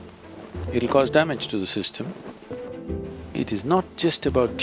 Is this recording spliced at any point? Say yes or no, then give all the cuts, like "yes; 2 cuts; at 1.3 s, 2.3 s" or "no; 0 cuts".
yes; 1 cut; at 2.7 s